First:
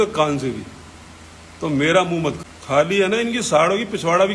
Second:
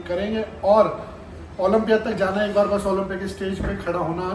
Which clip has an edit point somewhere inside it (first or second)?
first